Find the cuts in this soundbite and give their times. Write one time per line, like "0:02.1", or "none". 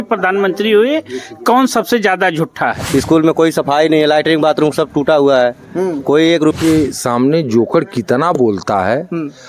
0:02.8
0:06.5